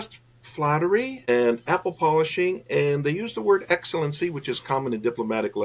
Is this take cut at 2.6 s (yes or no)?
no